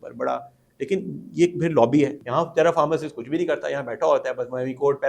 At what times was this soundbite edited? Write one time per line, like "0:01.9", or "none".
0:02.2